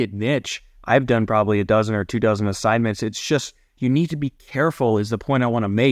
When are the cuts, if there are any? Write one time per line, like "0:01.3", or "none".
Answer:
none